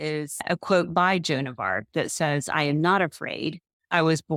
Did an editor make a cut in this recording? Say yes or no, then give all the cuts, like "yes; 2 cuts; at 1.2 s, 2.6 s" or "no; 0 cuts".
no; 0 cuts